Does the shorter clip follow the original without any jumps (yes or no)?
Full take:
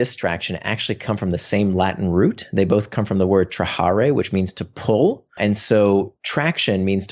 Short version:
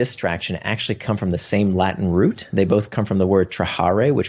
yes